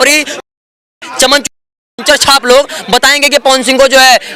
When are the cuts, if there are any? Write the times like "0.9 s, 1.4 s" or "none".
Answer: none